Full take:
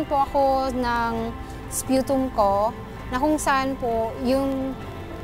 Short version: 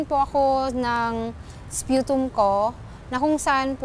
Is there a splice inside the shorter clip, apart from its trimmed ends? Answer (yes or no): no